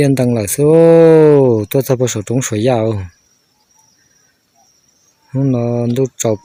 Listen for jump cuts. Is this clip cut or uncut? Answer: uncut